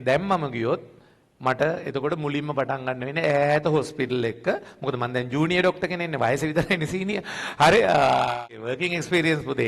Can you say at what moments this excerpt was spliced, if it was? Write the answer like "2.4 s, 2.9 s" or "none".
8.4 s